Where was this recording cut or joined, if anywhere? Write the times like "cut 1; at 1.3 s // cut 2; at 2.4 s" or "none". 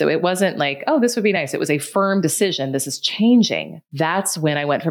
cut 1; at 3.8 s